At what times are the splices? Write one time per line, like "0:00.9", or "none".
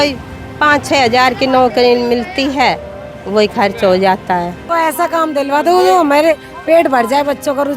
0:04.8